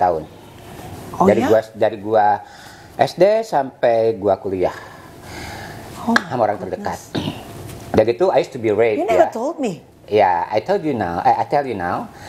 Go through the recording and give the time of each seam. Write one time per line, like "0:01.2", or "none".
none